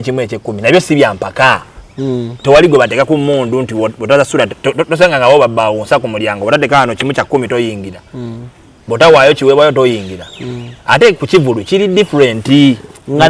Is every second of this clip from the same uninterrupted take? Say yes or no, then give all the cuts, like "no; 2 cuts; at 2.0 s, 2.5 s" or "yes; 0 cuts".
yes; 0 cuts